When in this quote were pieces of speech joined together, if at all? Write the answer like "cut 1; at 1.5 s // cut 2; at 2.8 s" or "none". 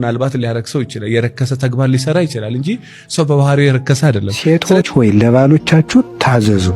cut 1; at 4.3 s